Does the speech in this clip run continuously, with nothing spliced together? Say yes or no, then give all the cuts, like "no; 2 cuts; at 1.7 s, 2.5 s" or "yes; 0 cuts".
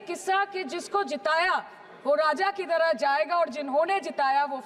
yes; 0 cuts